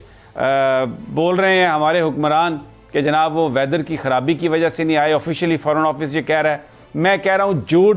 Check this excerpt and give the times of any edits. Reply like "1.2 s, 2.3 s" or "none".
none